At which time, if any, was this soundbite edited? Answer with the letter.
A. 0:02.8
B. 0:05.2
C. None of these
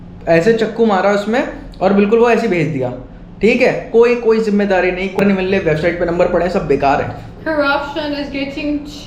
B